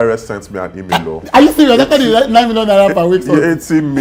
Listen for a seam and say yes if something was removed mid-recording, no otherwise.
no